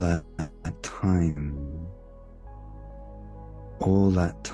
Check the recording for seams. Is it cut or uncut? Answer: cut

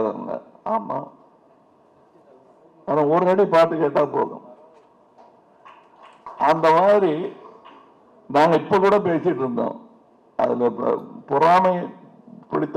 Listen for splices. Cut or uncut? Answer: uncut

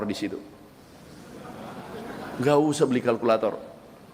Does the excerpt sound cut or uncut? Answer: uncut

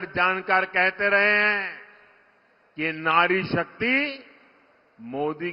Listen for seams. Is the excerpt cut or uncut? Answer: uncut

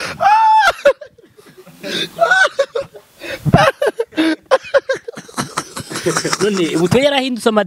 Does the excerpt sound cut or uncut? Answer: uncut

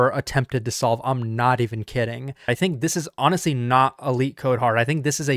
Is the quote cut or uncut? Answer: cut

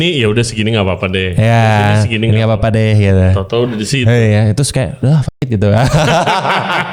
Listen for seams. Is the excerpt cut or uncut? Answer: uncut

